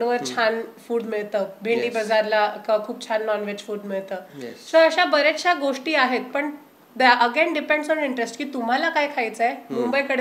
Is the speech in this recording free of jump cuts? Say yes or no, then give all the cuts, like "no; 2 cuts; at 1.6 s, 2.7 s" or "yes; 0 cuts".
yes; 0 cuts